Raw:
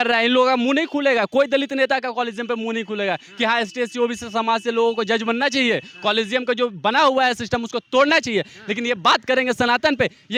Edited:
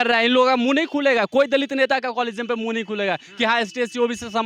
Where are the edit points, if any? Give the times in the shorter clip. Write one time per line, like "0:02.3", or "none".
none